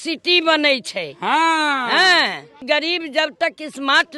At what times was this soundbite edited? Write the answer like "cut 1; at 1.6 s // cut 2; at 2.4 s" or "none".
cut 1; at 2.5 s